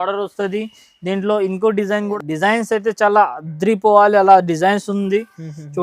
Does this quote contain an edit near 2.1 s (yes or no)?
yes